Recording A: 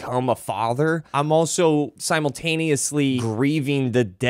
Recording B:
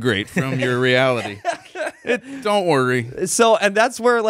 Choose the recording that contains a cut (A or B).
A